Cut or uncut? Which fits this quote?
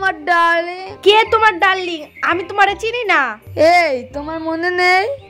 cut